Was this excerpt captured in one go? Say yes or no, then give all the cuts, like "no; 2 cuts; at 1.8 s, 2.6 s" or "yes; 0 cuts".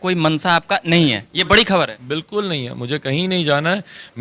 yes; 0 cuts